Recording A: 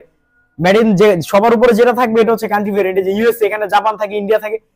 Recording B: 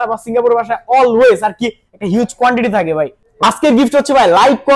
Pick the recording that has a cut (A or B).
B